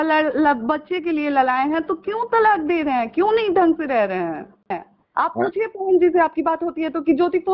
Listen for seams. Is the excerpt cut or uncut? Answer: cut